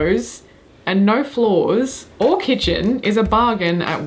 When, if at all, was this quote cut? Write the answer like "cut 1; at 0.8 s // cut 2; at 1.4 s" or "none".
none